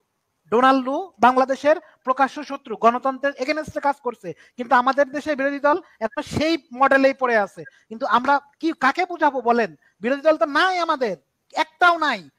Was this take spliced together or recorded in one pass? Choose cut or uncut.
uncut